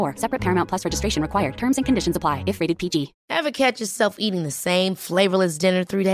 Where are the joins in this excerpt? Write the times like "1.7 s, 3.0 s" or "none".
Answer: 3.2 s